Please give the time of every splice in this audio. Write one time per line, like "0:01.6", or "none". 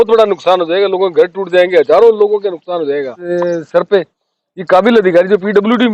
0:03.3